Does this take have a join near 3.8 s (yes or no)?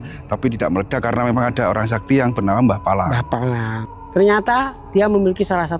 yes